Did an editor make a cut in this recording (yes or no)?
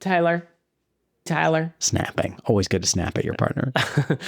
yes